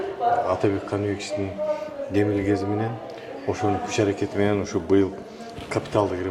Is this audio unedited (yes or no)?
yes